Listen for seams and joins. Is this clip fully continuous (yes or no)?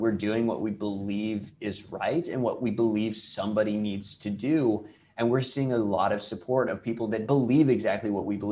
yes